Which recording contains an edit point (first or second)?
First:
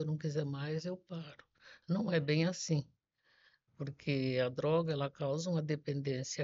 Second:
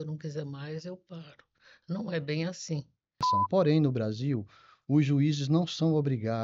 second